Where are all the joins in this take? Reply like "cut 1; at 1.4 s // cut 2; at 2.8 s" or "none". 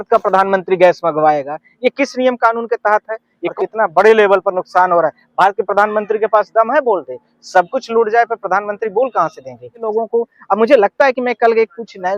cut 1; at 3.5 s // cut 2; at 9.9 s